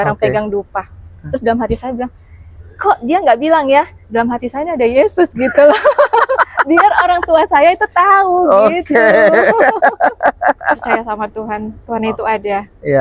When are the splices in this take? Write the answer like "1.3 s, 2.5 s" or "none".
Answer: 11.1 s